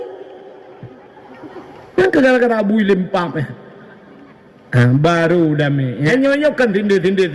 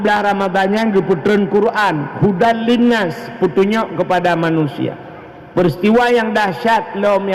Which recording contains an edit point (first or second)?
first